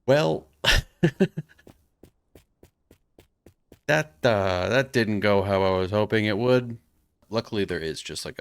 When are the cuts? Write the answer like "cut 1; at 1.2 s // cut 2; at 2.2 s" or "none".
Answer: cut 1; at 7.3 s